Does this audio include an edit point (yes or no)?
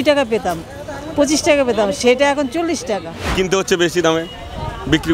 yes